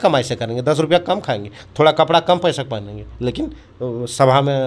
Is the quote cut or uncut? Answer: uncut